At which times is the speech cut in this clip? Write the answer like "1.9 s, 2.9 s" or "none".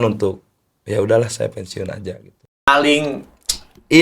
2.7 s